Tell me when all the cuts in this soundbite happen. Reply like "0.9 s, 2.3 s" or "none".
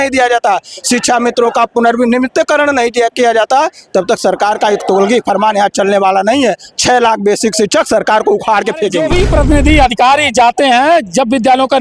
9.0 s

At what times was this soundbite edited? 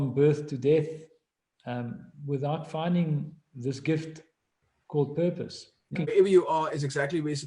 6.1 s

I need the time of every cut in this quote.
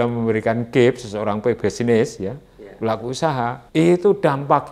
3.6 s

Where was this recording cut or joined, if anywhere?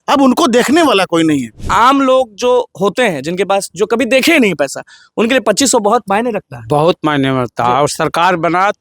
1.6 s

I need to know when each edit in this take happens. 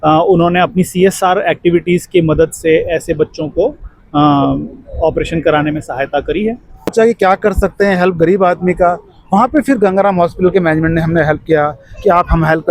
6.9 s

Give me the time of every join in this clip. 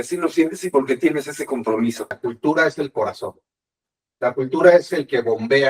2.2 s

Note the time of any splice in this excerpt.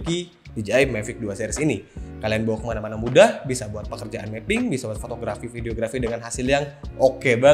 none

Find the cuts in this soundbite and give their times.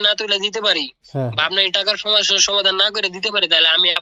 none

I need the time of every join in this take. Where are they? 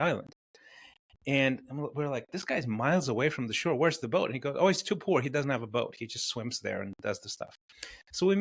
none

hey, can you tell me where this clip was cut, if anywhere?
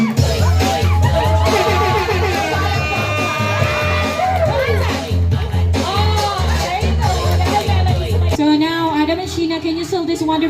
8.3 s

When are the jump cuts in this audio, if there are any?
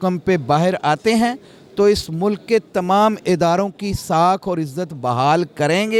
none

